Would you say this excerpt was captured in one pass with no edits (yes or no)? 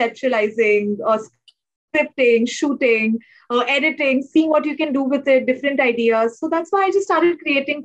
yes